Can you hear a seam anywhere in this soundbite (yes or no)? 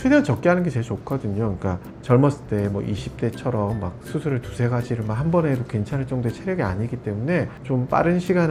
no